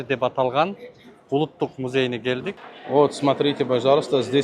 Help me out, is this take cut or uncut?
cut